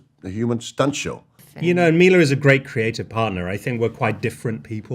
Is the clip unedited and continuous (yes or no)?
no